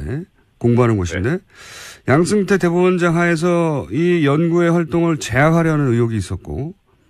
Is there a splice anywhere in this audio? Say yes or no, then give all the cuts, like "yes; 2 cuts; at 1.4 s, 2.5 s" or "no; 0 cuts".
yes; 1 cut; at 5.3 s